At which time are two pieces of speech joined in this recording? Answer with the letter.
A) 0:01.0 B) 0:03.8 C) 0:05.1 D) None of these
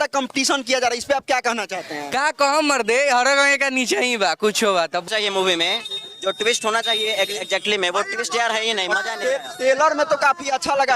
C